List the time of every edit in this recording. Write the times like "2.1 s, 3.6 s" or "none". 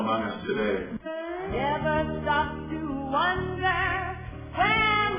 0.9 s